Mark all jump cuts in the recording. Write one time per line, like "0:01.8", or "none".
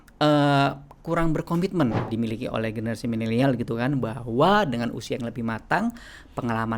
0:02.1

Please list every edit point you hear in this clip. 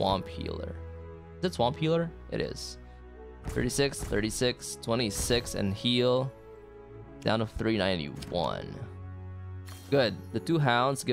none

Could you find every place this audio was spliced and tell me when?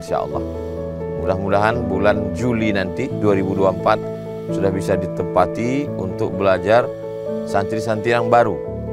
none

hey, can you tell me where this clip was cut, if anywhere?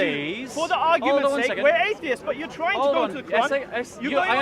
none

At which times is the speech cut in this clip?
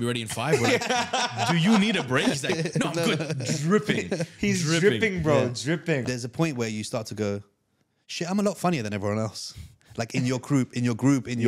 0:06.0

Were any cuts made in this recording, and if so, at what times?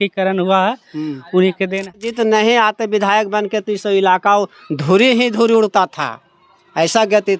0:02.0

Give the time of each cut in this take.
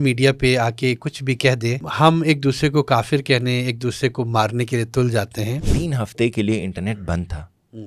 0:01.9
0:05.7

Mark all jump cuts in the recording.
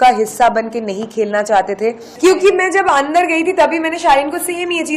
0:02.1

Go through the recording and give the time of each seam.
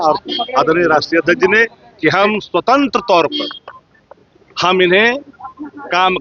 none

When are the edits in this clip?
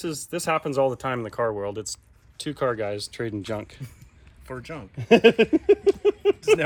none

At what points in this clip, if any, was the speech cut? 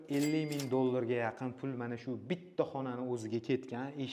none

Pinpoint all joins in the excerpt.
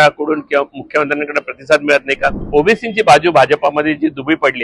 0:02.3

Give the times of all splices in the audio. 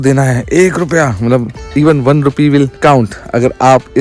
none

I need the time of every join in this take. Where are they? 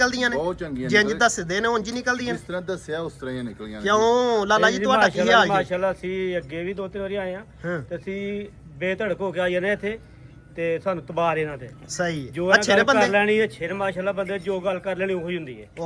none

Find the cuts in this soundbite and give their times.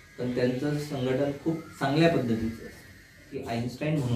0:03.3

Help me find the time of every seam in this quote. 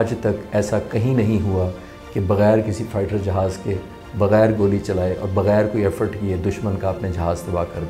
none

